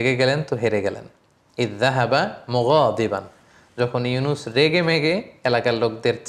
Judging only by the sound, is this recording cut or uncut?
uncut